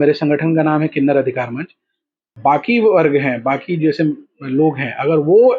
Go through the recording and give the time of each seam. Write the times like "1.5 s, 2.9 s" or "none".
2.2 s